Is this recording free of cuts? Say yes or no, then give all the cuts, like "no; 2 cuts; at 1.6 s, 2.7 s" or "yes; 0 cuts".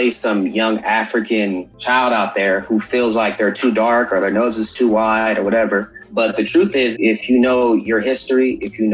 no; 3 cuts; at 1.7 s, 6.0 s, 6.9 s